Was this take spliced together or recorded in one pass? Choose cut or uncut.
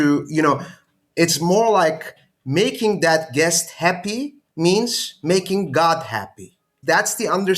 cut